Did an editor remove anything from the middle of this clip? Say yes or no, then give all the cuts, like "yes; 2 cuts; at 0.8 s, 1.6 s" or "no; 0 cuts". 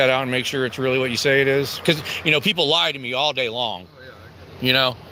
no; 0 cuts